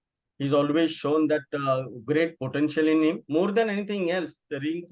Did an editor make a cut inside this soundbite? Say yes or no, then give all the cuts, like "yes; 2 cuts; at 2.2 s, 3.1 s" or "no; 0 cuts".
yes; 1 cut; at 3.2 s